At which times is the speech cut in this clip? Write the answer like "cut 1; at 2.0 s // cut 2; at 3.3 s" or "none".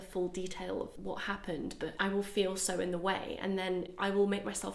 cut 1; at 1.0 s